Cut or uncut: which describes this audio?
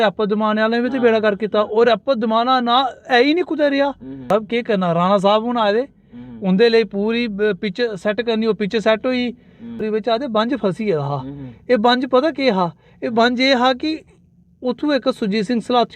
cut